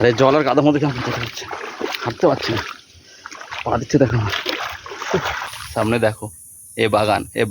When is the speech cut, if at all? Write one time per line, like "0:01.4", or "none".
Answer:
0:05.4